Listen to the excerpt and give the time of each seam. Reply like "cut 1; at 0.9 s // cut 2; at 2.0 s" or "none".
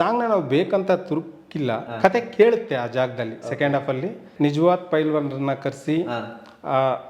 cut 1; at 4.2 s